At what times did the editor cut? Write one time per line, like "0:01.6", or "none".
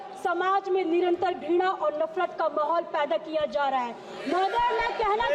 none